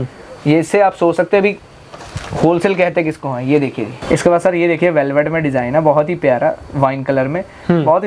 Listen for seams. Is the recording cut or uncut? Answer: uncut